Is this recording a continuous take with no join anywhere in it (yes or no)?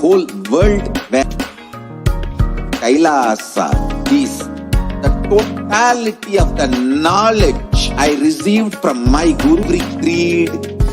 no